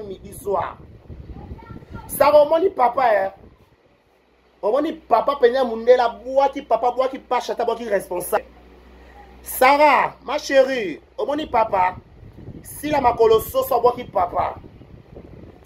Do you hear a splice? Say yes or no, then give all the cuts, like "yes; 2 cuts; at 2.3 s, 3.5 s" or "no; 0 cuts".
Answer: yes; 1 cut; at 8.4 s